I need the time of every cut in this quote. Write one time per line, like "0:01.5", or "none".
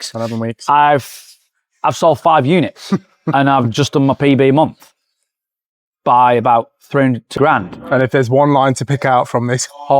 0:07.3